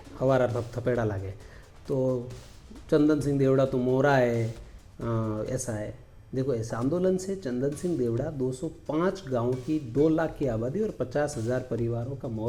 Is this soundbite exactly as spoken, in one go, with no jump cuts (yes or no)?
yes